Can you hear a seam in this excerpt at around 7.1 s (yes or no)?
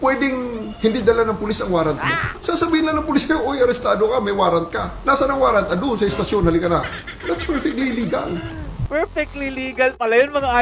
yes